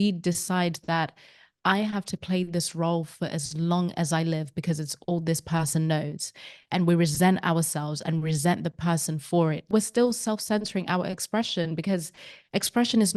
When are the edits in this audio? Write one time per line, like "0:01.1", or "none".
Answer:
none